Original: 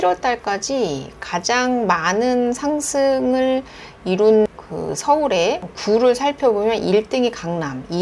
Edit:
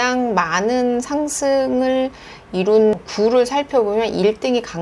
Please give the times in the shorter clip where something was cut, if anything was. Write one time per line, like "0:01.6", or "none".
0:03.1